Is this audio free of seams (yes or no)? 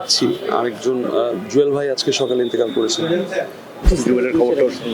no